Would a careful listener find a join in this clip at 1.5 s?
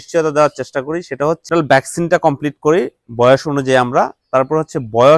yes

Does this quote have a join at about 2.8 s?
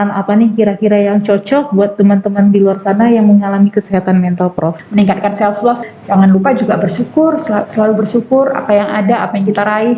no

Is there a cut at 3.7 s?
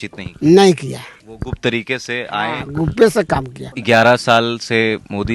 yes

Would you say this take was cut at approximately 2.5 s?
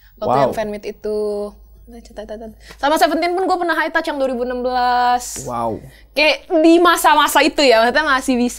no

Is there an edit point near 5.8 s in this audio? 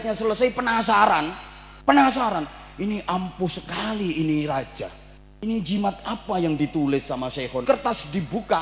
no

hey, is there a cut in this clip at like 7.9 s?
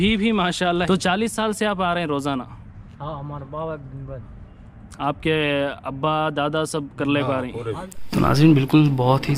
yes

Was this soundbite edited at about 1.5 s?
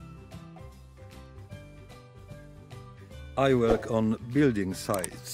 no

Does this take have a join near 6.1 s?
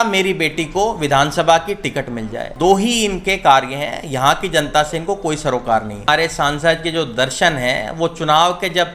yes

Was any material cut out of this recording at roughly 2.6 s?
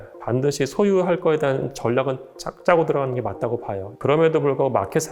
no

